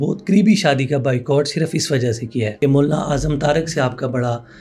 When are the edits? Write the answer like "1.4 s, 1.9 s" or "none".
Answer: 2.6 s